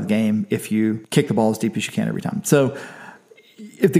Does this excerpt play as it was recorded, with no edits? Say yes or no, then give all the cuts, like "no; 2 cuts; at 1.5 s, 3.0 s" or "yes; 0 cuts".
no; 1 cut; at 1.0 s